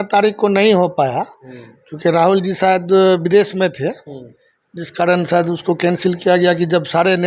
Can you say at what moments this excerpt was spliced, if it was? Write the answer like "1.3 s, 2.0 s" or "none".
none